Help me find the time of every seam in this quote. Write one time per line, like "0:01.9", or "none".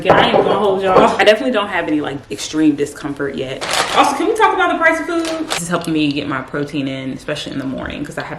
0:01.2
0:03.7
0:05.6